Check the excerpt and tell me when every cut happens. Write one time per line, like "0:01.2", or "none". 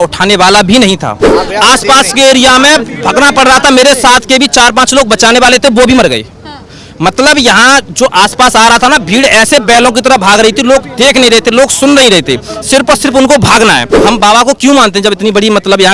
0:01.2
0:13.9